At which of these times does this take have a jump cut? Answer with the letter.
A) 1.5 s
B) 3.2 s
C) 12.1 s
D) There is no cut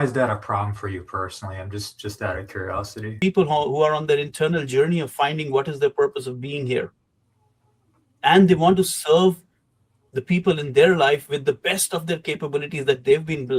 B